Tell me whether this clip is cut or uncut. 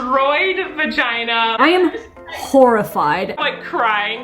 cut